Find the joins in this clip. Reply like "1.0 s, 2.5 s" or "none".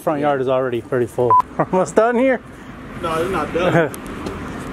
1.4 s